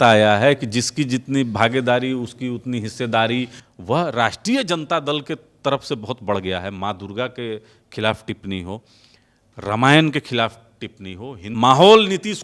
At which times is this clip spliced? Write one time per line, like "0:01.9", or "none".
0:03.6
0:11.4